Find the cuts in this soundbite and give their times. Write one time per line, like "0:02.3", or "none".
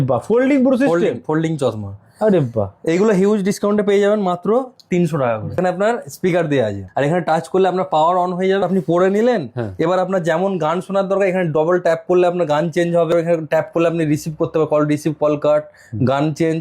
0:05.6
0:06.8
0:08.6
0:13.1